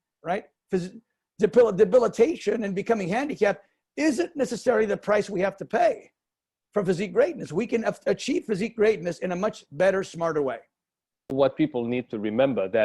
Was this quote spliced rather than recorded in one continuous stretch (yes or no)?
yes